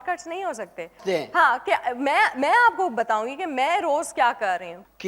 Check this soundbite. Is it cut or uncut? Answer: cut